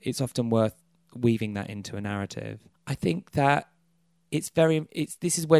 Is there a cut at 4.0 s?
no; 1 cut; at 2.7 s

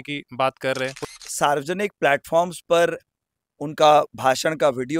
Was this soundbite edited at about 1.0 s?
yes; 1 cut; at 1.0 s

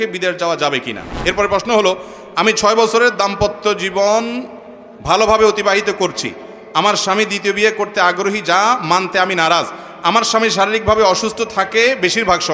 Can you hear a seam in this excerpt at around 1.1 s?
yes; 1 cut; at 1.1 s

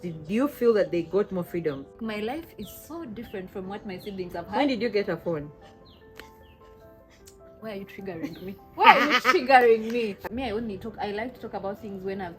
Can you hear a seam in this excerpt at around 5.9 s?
no; 2 cuts; at 2.0 s, 10.3 s

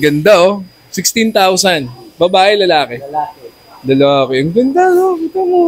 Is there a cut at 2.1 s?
no; 0 cuts

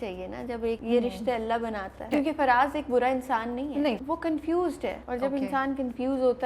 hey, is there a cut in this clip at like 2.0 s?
yes; 4 cuts; at 0.8 s, 2.0 s, 4.0 s, 5.0 s

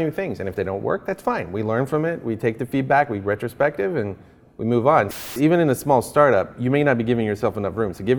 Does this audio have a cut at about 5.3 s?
yes; 1 cut; at 5.3 s

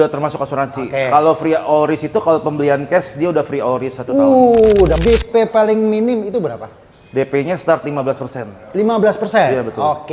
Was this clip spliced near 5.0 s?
yes; 1 cut; at 5.0 s

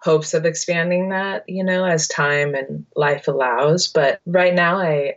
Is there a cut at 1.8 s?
no; 0 cuts

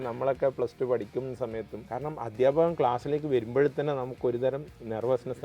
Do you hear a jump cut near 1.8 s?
yes; 1 cut; at 1.8 s

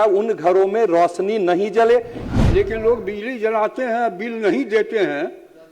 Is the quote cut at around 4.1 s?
no; 1 cut; at 2.2 s

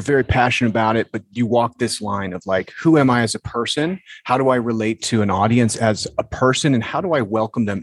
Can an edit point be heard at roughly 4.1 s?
no; 0 cuts

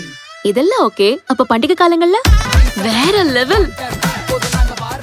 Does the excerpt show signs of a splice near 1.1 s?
no; 1 cut; at 2.5 s

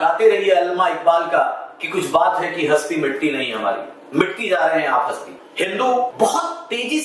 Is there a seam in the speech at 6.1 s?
yes; 2 cuts; at 5.4 s, 6.1 s

